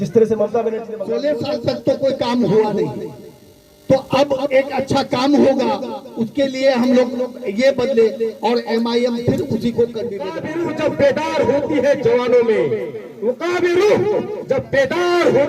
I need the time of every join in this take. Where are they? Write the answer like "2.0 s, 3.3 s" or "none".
0.9 s, 10.3 s